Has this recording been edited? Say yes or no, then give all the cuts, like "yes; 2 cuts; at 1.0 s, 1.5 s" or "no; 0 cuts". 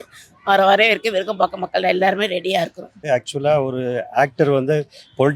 yes; 1 cut; at 2.9 s